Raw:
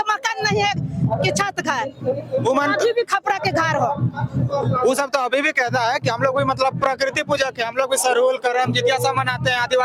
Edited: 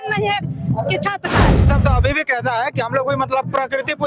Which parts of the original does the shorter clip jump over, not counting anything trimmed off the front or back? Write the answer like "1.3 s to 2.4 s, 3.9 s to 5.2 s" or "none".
2.0 s to 5.0 s